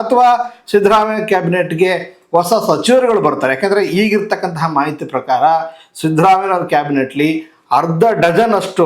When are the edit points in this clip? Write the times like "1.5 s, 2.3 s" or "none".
none